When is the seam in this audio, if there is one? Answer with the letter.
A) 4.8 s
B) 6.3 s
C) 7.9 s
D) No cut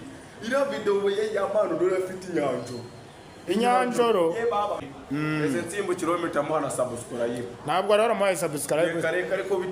A